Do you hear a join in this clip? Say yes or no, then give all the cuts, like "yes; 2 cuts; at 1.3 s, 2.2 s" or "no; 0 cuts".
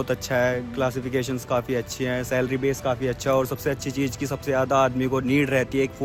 no; 0 cuts